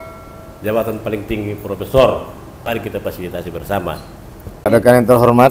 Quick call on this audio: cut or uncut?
cut